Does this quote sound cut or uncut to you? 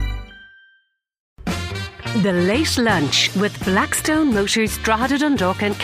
cut